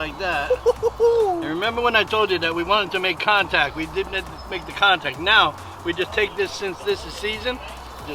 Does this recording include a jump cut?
no; 0 cuts

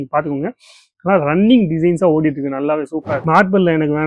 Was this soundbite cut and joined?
yes; 1 cut; at 3.1 s

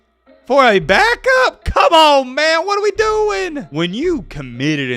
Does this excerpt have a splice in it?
yes; 1 cut; at 3.6 s

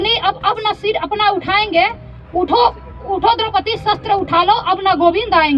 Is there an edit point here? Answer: no; 0 cuts

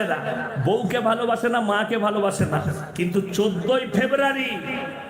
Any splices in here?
no; 0 cuts

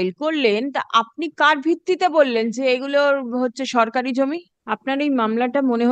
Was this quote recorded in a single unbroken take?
no; 1 cut; at 4.5 s

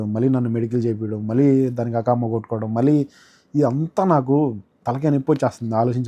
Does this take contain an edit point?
no; 0 cuts

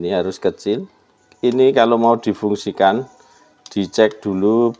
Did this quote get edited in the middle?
no; 0 cuts

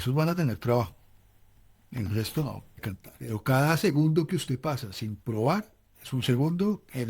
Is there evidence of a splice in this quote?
yes; 1 cut; at 3.0 s

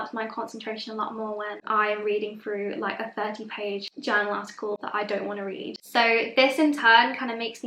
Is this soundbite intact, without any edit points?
no; 2 cuts; at 3.9 s, 5.8 s

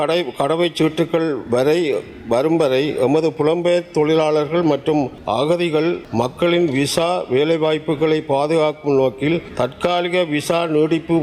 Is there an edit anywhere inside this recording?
yes; 3 cuts; at 5.2 s, 6.0 s, 9.5 s

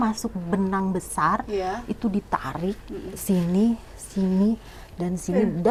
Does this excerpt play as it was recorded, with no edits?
yes; 0 cuts

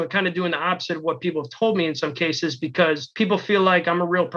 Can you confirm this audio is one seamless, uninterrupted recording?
no; 1 cut; at 3.1 s

